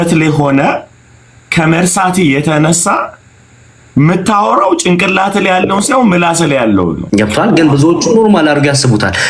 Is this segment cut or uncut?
cut